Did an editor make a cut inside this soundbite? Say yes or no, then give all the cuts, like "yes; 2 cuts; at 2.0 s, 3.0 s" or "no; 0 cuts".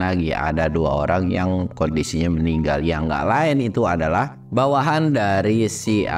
yes; 1 cut; at 4.4 s